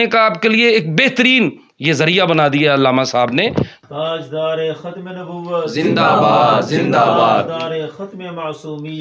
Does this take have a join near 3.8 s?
yes; 1 cut; at 3.8 s

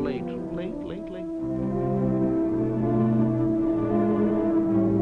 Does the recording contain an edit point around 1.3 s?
no; 0 cuts

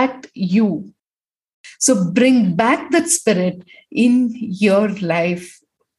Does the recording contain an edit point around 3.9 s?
no; 1 cut; at 1.6 s

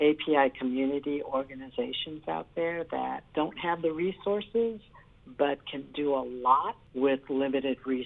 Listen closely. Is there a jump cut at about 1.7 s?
no; 2 cuts; at 3.2 s, 6.8 s

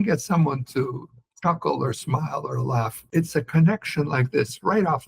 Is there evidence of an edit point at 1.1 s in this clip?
no; 1 cut; at 3.0 s

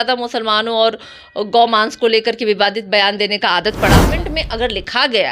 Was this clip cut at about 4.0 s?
yes; 1 cut; at 4.0 s

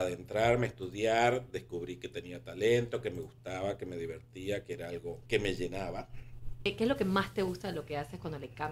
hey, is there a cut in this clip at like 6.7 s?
yes; 2 cuts; at 5.2 s, 6.7 s

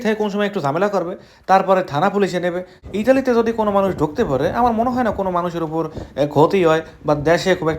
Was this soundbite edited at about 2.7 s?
yes; 1 cut; at 2.7 s

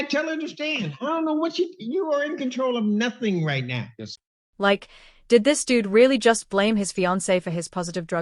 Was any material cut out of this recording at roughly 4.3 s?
no; 0 cuts

